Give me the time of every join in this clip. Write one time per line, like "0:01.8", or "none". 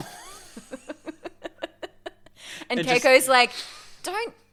none